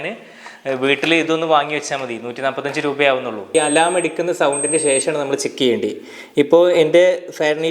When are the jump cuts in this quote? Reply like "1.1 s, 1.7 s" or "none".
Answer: 3.5 s